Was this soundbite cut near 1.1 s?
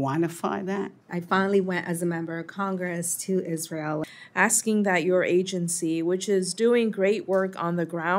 yes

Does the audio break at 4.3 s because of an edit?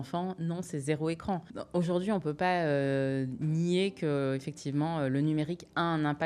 no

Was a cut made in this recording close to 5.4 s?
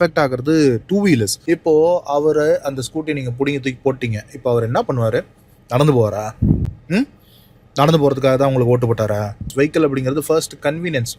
no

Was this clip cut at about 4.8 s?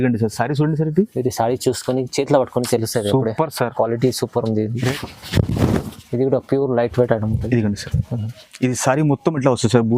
yes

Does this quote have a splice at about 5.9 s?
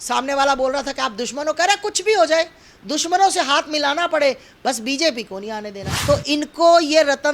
yes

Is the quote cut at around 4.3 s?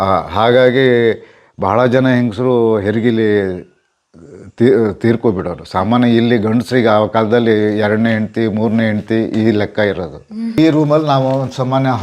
no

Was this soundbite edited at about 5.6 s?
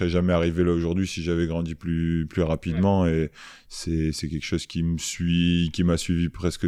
no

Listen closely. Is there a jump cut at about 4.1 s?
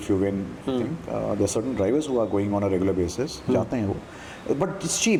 no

